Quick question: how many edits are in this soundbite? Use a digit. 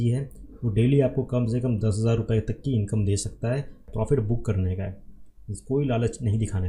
1